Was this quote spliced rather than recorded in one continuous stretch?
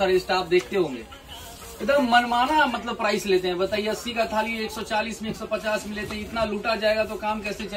no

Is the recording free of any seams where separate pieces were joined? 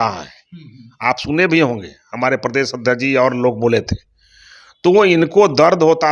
yes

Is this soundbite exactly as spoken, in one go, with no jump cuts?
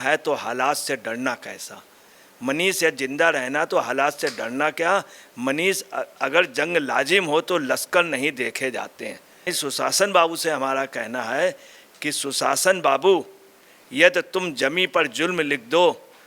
no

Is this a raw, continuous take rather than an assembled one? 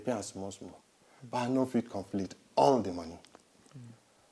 yes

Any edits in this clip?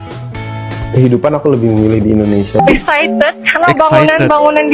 yes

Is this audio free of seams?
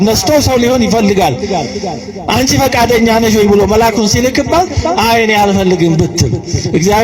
yes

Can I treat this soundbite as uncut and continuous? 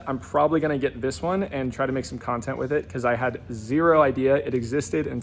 yes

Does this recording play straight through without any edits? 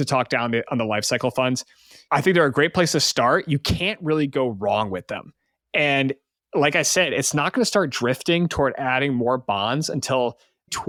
yes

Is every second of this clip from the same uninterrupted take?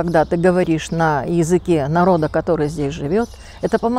yes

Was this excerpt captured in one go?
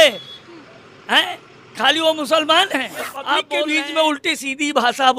no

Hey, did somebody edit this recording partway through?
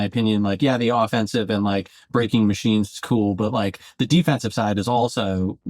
no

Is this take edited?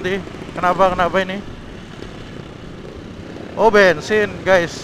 no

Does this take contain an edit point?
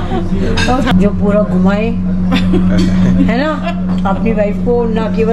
yes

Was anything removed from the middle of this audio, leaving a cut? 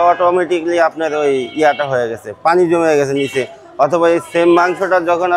no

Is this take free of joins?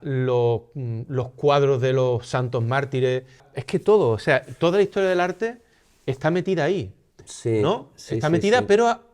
no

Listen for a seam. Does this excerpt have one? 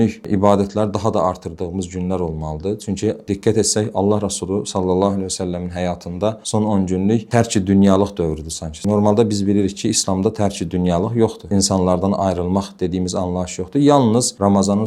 no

